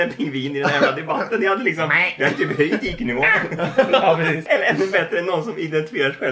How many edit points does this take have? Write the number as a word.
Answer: one